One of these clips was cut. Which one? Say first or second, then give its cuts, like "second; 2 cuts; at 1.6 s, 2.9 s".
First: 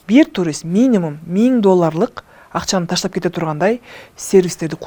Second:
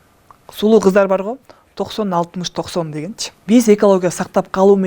second; 1 cut; at 3.3 s